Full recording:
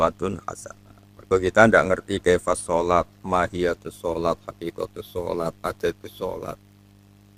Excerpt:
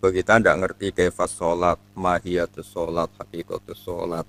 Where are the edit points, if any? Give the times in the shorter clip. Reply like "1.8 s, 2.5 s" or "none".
none